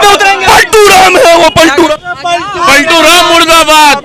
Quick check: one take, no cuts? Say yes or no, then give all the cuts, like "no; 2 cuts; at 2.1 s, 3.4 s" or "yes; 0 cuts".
no; 1 cut; at 2.1 s